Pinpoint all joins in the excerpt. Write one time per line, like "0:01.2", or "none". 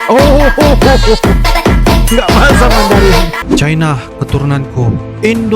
0:03.4

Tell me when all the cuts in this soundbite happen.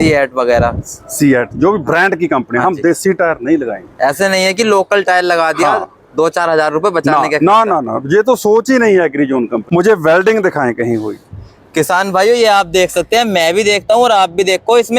0:09.6

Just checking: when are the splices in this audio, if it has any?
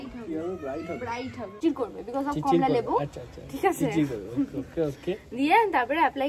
0:01.6

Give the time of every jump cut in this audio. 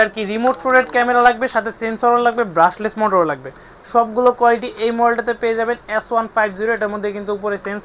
none

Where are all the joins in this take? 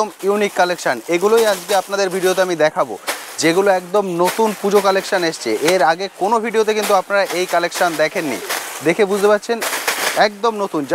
none

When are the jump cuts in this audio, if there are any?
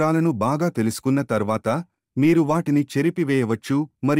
none

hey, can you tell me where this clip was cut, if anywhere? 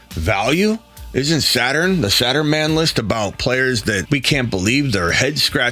0:04.0

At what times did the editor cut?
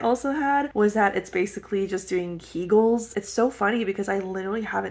0:03.1

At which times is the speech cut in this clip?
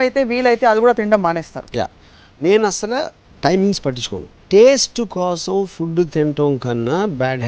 0:04.4

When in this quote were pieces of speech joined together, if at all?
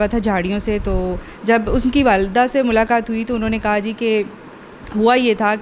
none

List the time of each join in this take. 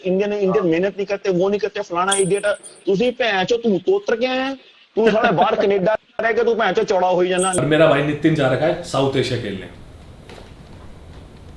0:07.5

